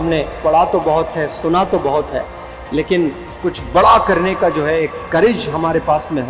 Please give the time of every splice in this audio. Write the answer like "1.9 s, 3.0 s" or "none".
none